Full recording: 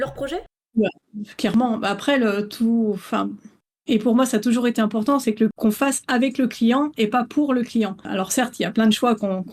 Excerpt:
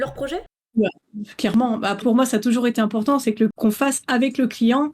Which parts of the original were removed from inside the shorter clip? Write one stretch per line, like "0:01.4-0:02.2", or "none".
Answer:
0:02.0-0:04.0